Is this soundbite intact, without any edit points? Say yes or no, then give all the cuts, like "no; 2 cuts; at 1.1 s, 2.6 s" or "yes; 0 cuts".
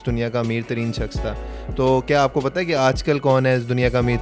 yes; 0 cuts